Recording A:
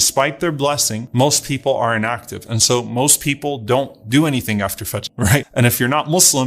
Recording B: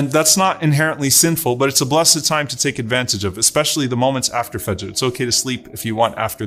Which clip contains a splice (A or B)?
A